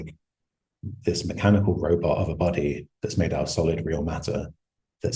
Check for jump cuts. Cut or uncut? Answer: uncut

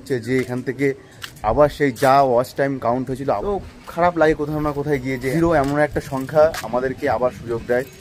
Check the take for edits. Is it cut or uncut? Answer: cut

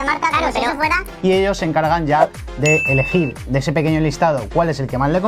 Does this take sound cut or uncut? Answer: cut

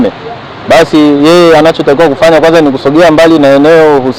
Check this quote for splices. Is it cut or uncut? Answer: uncut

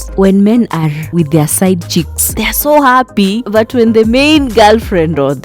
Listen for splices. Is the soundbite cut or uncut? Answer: uncut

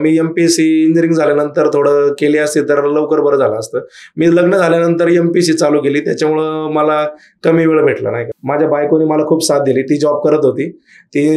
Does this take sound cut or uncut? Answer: cut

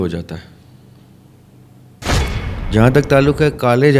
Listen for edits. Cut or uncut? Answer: cut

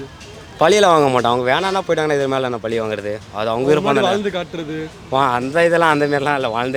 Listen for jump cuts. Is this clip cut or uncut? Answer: uncut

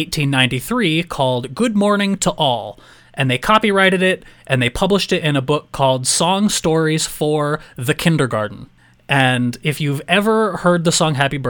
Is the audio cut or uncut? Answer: uncut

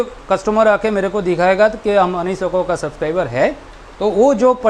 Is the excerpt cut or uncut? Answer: uncut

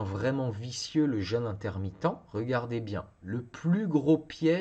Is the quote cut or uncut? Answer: cut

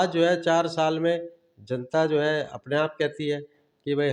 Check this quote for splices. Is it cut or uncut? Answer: uncut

